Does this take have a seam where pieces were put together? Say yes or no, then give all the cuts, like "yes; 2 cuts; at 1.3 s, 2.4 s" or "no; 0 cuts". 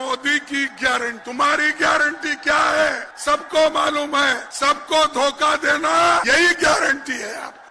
yes; 4 cuts; at 1.2 s, 3.1 s, 4.5 s, 6.2 s